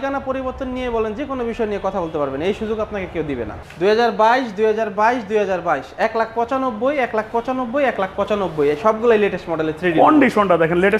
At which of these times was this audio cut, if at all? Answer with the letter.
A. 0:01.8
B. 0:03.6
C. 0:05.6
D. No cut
B